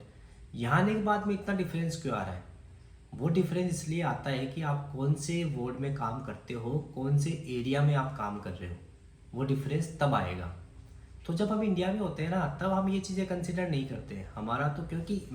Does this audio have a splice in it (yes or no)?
no